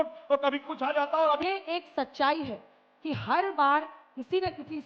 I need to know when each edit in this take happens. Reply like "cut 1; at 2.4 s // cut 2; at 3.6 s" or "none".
cut 1; at 1.4 s